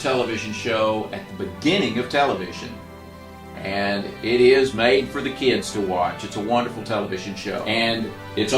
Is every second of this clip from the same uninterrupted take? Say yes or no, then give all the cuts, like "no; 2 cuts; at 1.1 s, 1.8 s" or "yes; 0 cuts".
no; 1 cut; at 7.6 s